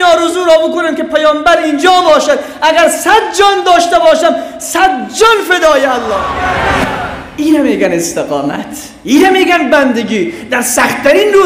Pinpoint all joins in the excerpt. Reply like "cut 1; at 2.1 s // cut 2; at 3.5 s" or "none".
cut 1; at 6.5 s